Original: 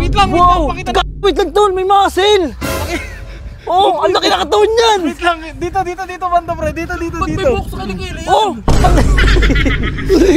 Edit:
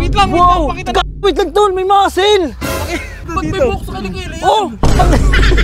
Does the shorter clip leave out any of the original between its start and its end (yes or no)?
yes